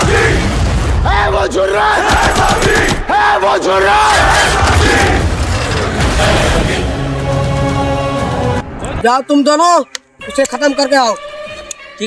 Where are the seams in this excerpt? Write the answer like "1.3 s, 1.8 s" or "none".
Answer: 8.6 s